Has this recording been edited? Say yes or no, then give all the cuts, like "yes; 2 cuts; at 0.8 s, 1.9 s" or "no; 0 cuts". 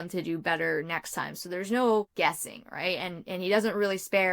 yes; 1 cut; at 2.1 s